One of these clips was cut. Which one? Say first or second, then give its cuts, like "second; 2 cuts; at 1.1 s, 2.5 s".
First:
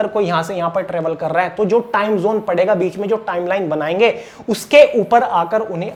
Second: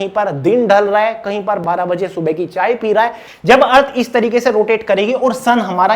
second; 2 cuts; at 1.6 s, 3.3 s